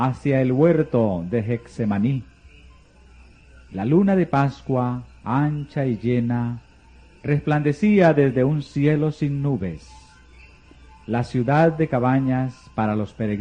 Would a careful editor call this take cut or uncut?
uncut